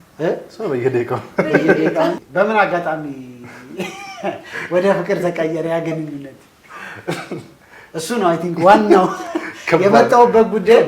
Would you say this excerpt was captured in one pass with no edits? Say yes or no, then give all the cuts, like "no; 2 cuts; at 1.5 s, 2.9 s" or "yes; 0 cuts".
no; 1 cut; at 2.2 s